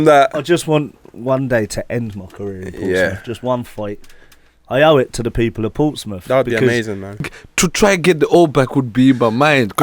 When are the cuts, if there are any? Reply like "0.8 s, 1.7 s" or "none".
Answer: 7.4 s

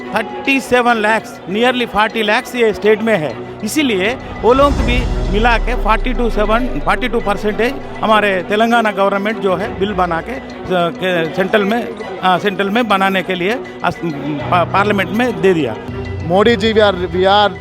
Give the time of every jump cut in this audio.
15.9 s

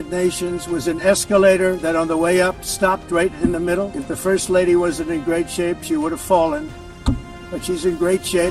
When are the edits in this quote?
4.0 s

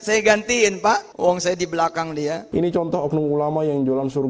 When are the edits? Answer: 1.1 s, 2.4 s

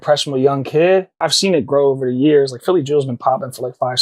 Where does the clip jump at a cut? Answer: 1.2 s

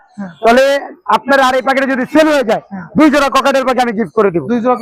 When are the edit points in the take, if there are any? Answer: none

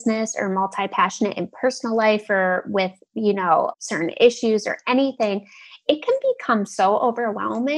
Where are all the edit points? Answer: 3.8 s

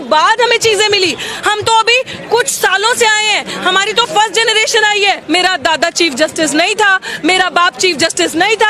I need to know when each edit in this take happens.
5.2 s

